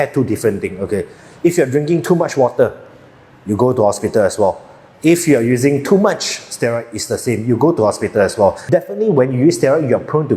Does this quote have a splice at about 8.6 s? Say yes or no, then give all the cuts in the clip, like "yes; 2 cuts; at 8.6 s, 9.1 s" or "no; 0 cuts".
yes; 1 cut; at 8.6 s